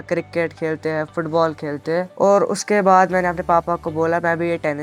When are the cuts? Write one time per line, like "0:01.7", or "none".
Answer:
0:02.1